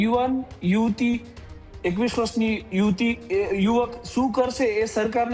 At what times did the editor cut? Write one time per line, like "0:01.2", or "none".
none